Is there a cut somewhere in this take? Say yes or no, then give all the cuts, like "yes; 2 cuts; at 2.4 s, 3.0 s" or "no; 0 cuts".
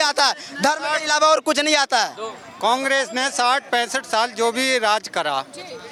no; 0 cuts